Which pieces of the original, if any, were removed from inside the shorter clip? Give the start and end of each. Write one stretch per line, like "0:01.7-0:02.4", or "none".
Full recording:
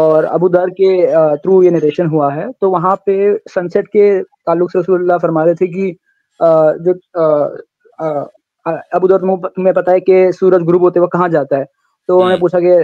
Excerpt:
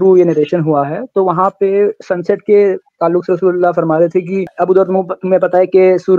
0:06.0-0:08.8